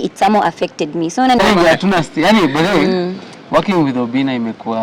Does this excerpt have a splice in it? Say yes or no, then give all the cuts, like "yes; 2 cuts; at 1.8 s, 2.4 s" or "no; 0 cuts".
yes; 1 cut; at 1.4 s